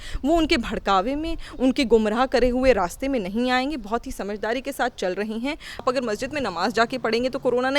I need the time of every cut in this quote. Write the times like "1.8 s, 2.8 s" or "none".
5.8 s